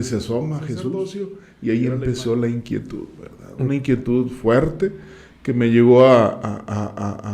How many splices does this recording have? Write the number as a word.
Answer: one